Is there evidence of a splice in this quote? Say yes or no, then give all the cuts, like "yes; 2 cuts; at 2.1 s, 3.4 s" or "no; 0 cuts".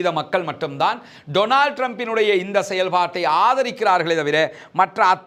no; 0 cuts